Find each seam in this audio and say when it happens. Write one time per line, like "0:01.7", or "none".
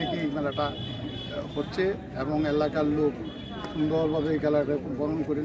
none